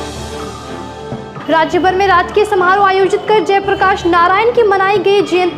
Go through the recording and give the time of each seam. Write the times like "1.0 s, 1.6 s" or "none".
1.3 s